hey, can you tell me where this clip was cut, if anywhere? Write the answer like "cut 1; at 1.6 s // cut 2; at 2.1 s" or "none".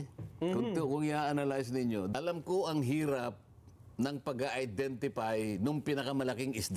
cut 1; at 2.1 s